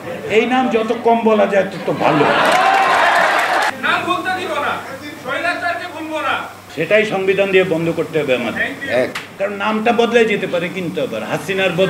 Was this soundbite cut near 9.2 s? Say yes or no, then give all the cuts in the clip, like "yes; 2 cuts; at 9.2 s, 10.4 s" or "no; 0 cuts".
yes; 3 cuts; at 3.7 s, 6.6 s, 9.2 s